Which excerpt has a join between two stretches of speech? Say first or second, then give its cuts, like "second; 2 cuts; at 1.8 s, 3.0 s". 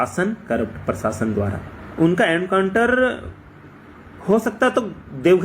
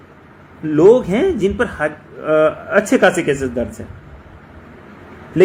first; 1 cut; at 1.8 s